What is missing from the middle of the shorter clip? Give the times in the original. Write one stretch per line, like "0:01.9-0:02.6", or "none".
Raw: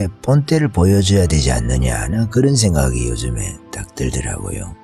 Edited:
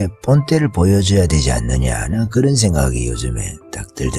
none